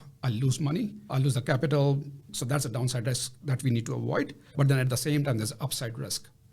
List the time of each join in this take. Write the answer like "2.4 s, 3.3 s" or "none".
4.4 s